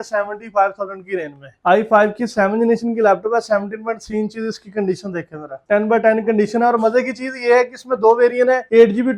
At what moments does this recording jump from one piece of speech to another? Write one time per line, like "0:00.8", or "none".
0:01.5
0:05.6